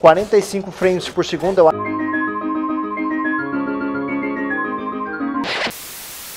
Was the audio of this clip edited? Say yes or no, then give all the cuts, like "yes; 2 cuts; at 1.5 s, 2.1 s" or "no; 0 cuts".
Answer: yes; 1 cut; at 1.7 s